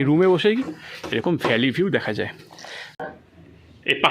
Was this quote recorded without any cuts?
no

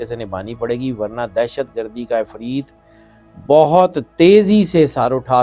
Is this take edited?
no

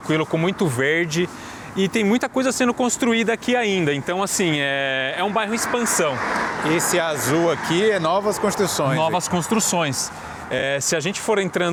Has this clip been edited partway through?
no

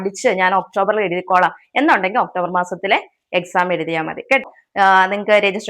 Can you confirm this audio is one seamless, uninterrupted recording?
no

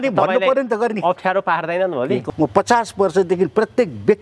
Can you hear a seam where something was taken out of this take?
yes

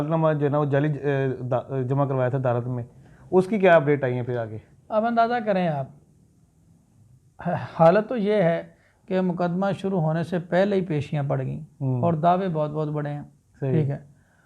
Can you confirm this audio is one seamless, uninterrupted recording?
yes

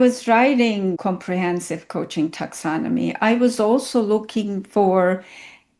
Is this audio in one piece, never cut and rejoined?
no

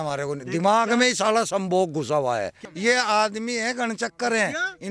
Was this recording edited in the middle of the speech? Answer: yes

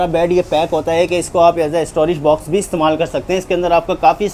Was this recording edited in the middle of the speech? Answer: no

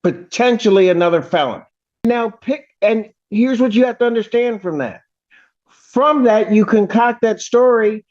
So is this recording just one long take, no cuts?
no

